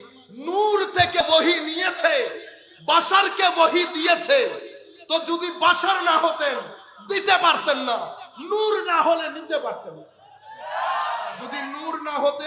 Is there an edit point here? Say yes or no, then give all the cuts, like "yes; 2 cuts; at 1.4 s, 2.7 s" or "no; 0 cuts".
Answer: yes; 1 cut; at 1.2 s